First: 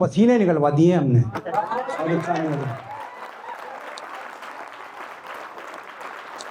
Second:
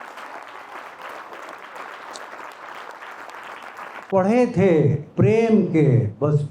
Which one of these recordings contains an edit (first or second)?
second